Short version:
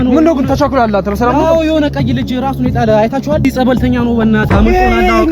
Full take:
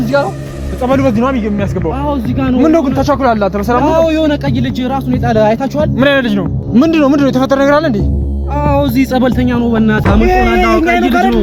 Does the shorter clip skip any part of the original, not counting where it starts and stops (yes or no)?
yes